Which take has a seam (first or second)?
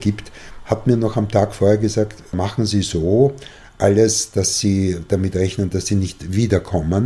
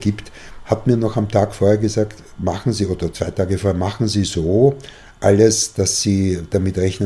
first